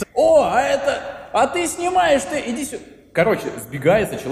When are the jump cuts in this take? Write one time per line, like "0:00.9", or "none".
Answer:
none